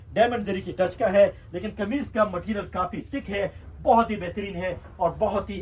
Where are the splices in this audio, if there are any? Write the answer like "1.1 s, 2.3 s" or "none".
none

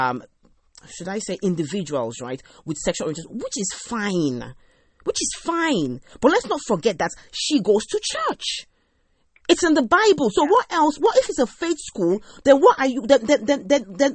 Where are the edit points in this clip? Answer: none

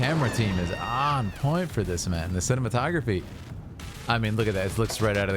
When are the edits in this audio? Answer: none

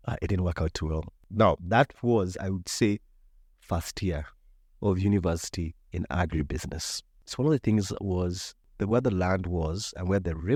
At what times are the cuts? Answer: none

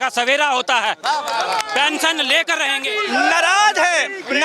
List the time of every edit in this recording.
2.8 s

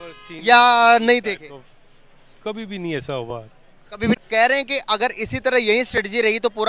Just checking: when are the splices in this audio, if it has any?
4.2 s

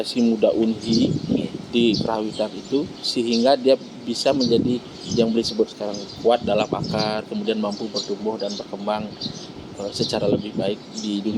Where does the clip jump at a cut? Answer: none

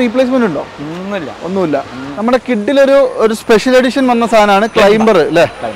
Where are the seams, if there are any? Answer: 2.1 s

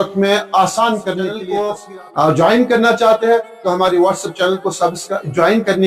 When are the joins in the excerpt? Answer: 1.5 s

